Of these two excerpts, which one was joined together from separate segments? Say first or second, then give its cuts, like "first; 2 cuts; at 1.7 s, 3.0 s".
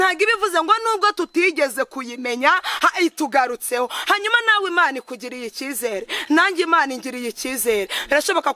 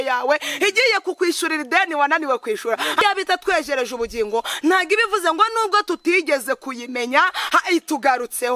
second; 1 cut; at 3.0 s